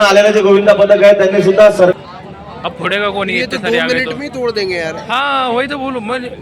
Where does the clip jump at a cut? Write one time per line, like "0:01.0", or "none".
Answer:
0:01.9